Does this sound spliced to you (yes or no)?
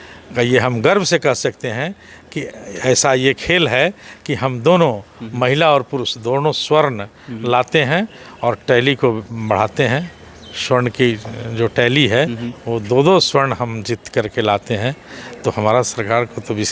no